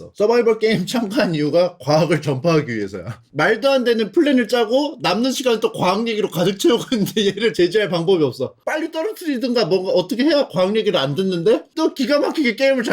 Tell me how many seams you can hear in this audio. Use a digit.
2